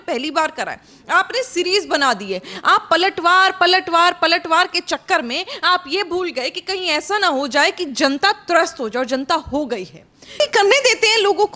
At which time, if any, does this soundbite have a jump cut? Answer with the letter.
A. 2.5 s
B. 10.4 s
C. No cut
B